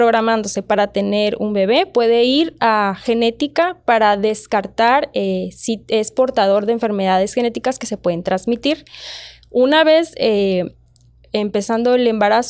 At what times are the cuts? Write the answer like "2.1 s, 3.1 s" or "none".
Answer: none